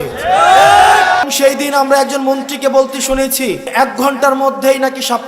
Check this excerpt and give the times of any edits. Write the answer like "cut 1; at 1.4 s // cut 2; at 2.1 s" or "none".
cut 1; at 1.3 s // cut 2; at 3.7 s